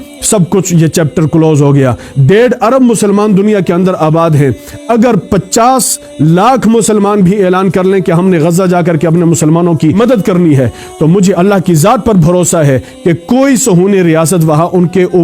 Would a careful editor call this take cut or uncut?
cut